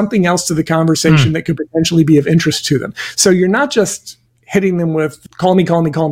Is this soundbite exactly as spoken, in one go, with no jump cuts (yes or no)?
yes